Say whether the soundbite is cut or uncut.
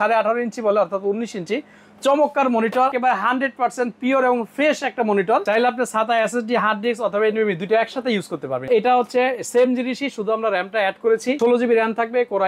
cut